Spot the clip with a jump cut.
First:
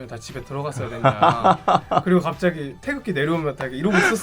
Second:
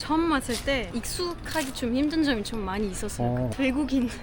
second; 1 cut; at 0.9 s

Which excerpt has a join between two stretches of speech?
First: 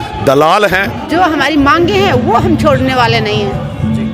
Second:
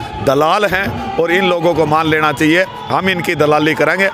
first; 1 cut; at 1.0 s

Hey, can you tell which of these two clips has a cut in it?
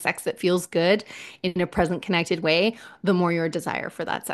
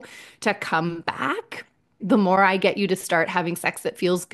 second; 1 cut; at 2.0 s

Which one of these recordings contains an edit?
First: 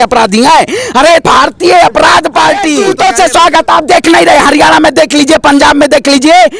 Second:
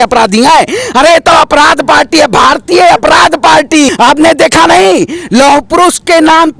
first; 2 cuts; at 1.2 s, 2.8 s

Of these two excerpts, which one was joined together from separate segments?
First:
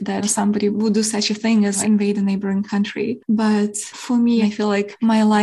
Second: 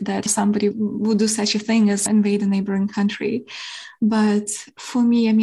first; 3 cuts; at 0.7 s, 3.2 s, 4.4 s

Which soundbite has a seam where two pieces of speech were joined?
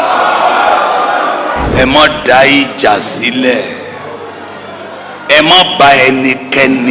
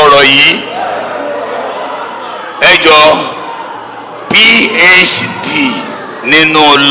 first; 1 cut; at 1.6 s

